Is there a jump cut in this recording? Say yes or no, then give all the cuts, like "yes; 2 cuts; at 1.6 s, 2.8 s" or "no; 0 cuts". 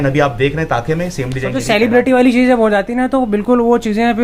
yes; 1 cut; at 1.6 s